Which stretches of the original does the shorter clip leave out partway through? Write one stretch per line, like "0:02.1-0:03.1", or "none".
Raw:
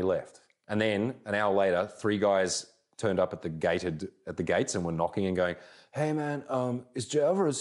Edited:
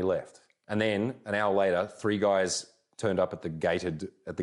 none